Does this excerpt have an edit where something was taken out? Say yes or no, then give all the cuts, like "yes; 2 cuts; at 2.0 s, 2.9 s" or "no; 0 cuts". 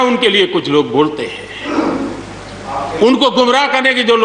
no; 0 cuts